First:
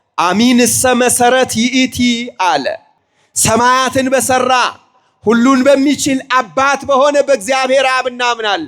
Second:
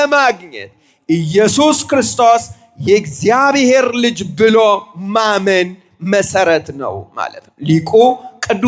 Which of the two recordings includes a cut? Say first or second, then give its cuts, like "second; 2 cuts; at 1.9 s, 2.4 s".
first; 1 cut; at 2.8 s